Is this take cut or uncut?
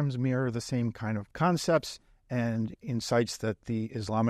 cut